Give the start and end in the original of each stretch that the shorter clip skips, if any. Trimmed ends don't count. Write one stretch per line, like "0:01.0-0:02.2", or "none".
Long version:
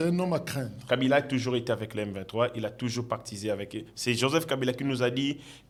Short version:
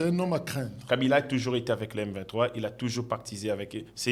none